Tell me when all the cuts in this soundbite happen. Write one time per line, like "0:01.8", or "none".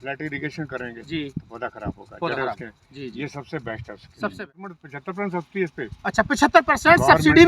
0:04.9